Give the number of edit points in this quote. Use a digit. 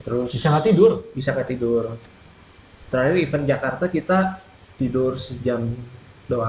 0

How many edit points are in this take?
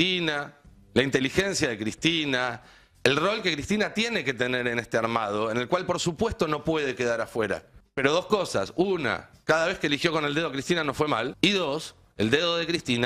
2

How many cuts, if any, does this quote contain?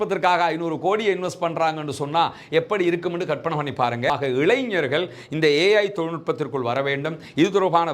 1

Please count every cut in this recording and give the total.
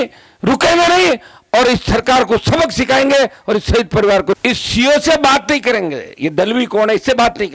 1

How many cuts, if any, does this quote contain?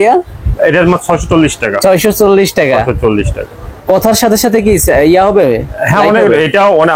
0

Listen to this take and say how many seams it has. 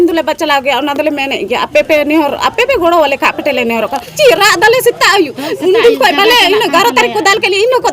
1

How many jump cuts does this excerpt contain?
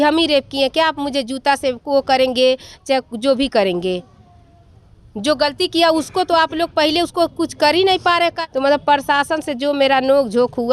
1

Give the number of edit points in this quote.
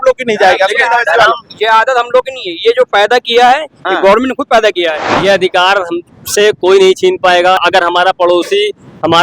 2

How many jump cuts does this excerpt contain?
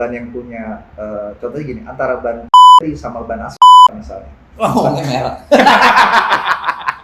0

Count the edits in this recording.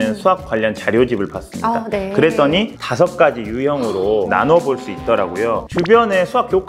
2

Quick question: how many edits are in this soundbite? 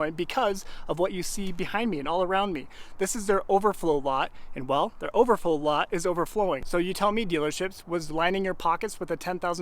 1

